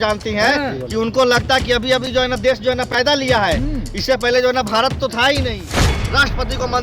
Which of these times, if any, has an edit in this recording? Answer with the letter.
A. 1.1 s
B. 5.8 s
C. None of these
B